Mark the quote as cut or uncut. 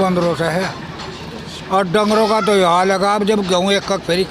uncut